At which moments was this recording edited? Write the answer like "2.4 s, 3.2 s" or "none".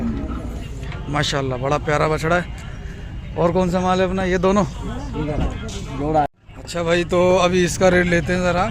6.3 s